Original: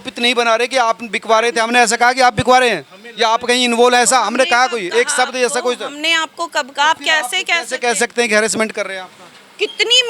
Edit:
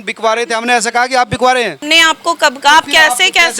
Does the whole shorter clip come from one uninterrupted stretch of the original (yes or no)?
no